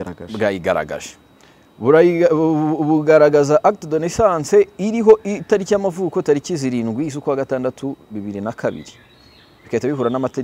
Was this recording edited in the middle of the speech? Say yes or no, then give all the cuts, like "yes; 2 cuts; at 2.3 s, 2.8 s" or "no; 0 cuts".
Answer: no; 0 cuts